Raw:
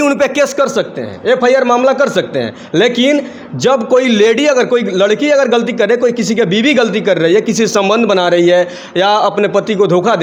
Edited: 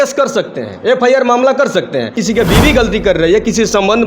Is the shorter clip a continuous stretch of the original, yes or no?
no